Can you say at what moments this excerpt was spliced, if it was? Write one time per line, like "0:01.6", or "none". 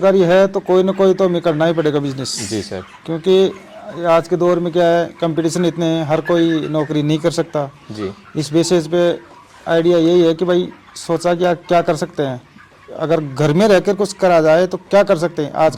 none